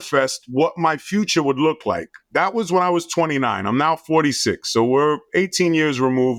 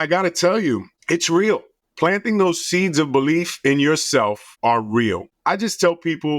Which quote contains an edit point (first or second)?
second